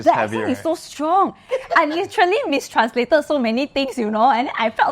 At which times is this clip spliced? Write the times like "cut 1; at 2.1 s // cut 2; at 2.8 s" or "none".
cut 1; at 1.5 s

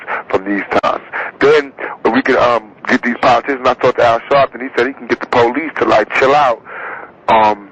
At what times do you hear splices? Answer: cut 1; at 1.8 s

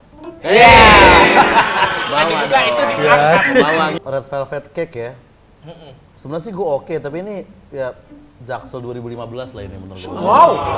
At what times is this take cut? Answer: cut 1; at 4.0 s

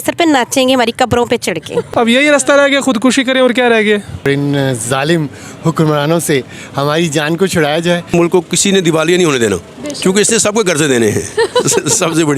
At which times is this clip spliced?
cut 1; at 1.9 s // cut 2; at 4.3 s // cut 3; at 8.1 s

